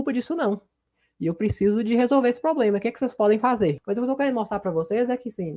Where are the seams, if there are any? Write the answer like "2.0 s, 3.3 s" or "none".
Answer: 3.8 s